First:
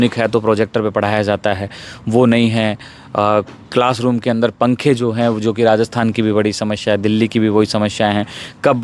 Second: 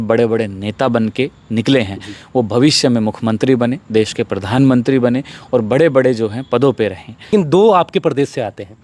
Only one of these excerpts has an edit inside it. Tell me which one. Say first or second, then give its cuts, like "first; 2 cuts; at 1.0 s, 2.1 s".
second; 1 cut; at 7.3 s